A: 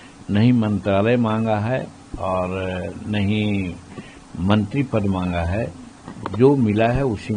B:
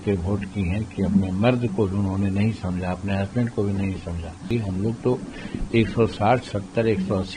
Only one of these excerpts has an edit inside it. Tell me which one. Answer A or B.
B